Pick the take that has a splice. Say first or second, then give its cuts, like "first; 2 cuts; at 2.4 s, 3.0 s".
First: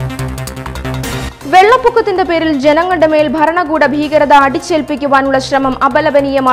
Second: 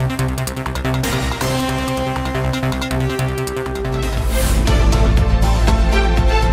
second; 1 cut; at 1.3 s